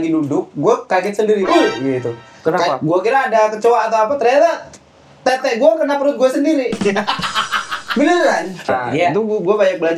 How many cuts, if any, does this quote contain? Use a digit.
1